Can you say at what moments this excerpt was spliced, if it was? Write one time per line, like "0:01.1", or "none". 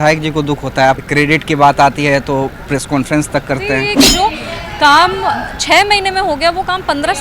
0:01.0
0:04.0